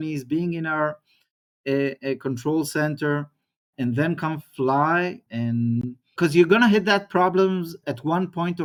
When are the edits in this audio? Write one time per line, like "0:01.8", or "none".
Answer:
none